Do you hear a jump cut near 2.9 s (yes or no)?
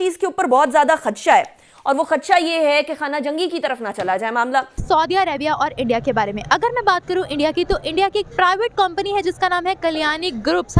no